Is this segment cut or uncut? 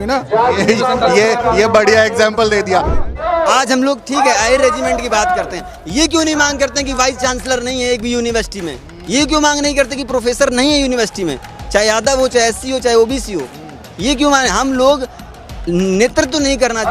cut